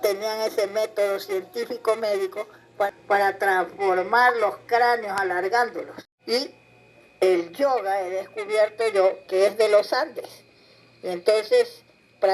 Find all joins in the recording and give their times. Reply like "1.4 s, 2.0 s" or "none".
none